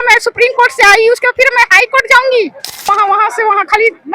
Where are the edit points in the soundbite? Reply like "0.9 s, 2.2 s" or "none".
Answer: 2.9 s